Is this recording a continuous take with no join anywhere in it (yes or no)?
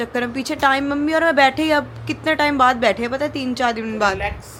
yes